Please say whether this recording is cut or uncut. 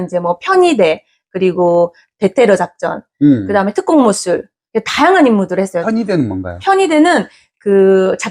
cut